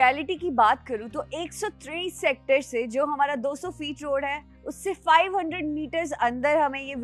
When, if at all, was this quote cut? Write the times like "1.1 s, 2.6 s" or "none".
none

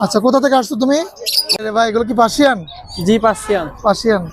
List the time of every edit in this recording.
1.5 s

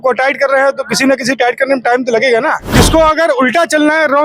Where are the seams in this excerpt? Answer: 2.7 s

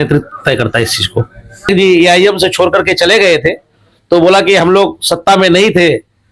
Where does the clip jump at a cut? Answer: 1.7 s

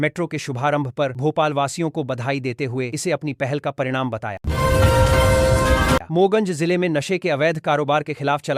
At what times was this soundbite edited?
4.4 s, 6.0 s

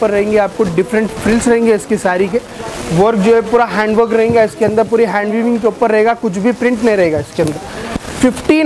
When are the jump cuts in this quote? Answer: none

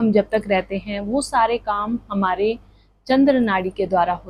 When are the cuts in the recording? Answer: none

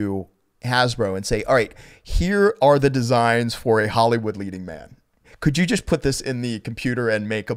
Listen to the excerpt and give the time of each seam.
none

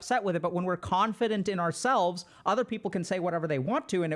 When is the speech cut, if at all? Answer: none

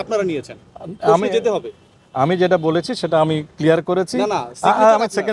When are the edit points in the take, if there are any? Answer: none

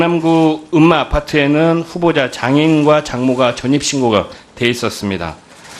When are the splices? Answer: 1.1 s

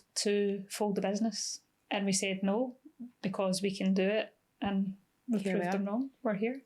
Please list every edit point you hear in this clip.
1.7 s

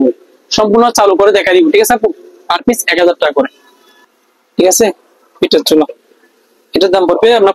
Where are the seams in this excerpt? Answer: none

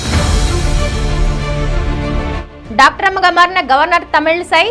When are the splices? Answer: 2.3 s

